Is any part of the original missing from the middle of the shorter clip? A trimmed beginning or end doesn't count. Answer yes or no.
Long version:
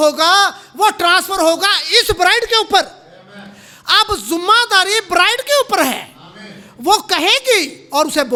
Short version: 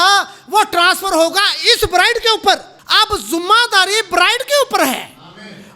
yes